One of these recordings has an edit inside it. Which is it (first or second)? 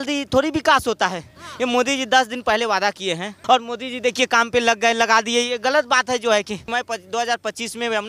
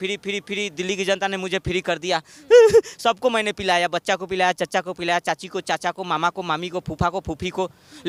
first